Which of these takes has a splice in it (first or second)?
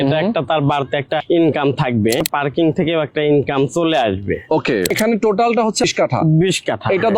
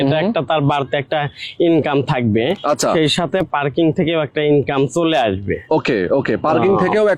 first